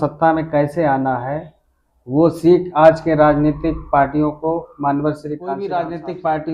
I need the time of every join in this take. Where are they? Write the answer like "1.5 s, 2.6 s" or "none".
5.6 s